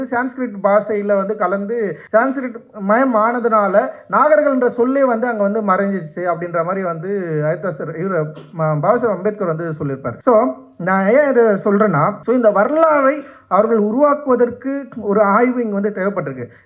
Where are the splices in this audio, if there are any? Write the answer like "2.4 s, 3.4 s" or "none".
2.0 s, 10.1 s, 12.2 s